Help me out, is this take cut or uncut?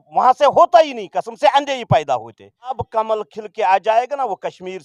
cut